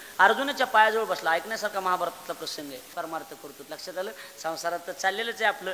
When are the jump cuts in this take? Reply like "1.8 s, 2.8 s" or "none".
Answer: 2.9 s